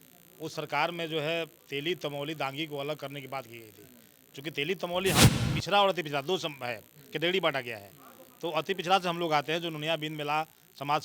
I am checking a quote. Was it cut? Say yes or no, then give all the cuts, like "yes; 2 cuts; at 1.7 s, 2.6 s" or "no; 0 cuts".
yes; 1 cut; at 5.2 s